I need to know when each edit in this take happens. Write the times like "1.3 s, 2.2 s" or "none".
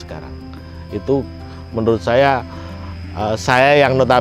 none